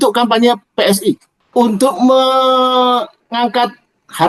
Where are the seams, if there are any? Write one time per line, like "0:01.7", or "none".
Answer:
0:01.3